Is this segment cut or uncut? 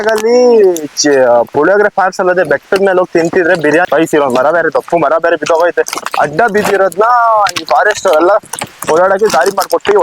cut